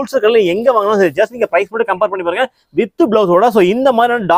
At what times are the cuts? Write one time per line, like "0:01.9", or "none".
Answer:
none

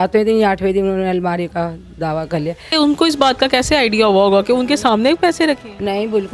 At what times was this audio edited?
0:02.7

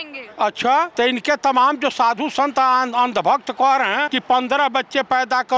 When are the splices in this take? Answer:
0:00.9
0:04.1

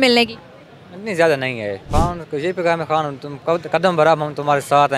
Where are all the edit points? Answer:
0:01.8

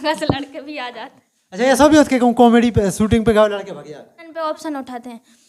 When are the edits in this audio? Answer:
0:04.3

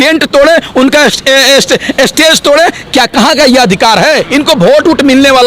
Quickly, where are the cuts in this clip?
0:04.2

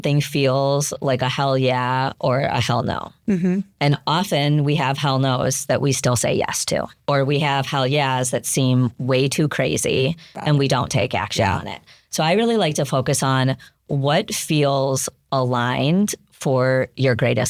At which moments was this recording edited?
0:06.9
0:10.4

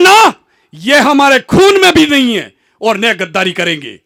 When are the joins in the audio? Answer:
none

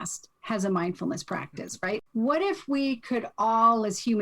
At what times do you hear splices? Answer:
0:02.0

